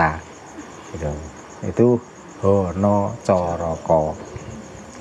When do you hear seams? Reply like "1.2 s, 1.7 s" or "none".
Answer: none